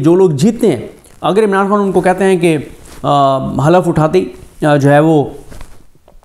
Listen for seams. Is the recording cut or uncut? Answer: uncut